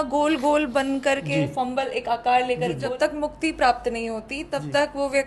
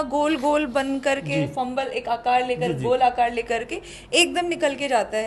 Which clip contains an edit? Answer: first; 1 cut; at 2.8 s

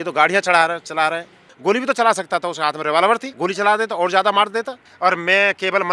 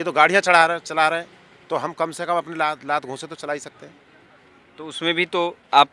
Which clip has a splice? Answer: first; 3 cuts; at 1.4 s, 3.3 s, 4.8 s

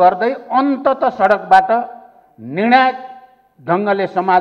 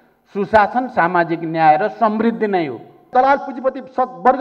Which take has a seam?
second; 1 cut; at 3.1 s

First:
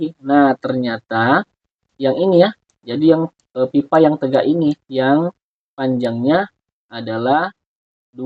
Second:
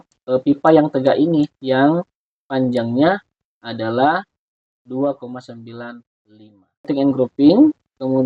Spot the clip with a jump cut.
second; 1 cut; at 6.9 s

